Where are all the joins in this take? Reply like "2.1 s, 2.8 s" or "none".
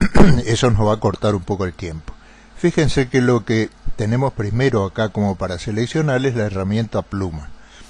1.0 s

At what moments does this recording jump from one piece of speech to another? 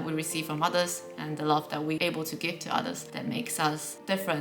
2.0 s, 3.1 s

